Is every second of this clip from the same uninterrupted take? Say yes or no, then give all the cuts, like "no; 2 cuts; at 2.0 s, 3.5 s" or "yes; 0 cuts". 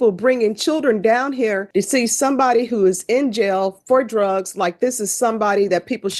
no; 1 cut; at 1.6 s